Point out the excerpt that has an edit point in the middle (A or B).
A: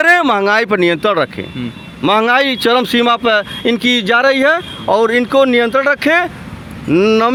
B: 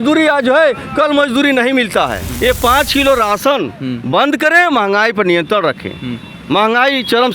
B